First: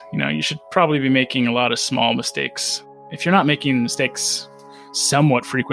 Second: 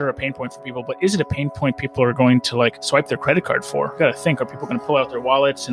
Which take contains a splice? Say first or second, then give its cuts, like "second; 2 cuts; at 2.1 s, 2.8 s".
second; 2 cuts; at 2.8 s, 3.9 s